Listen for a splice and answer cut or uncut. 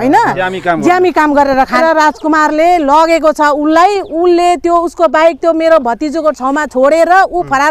cut